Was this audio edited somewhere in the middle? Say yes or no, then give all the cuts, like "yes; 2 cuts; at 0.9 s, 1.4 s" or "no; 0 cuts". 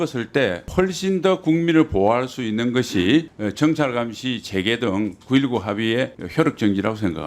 no; 0 cuts